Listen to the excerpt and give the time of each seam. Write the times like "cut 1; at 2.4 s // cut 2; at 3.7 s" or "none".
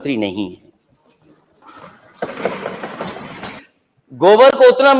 cut 1; at 3.6 s